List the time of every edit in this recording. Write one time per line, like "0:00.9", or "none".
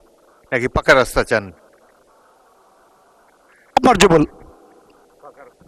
none